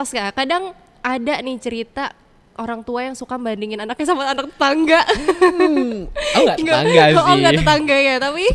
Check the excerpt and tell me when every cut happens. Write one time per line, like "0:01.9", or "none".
none

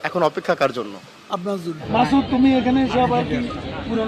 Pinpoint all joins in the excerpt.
0:01.8

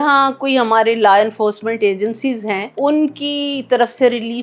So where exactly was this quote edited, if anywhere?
0:02.7

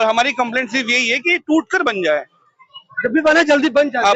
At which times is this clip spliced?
none

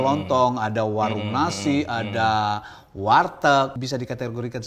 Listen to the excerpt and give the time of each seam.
0:03.7

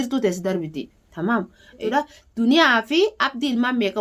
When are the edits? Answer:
0:01.7

